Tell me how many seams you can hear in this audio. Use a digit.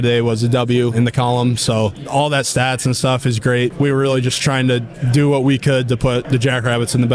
4